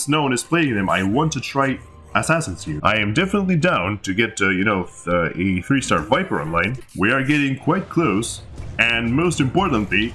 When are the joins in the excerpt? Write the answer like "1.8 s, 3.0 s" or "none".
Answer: 2.7 s, 6.8 s